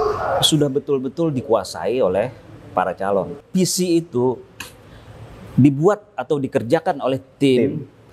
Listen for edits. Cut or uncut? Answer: cut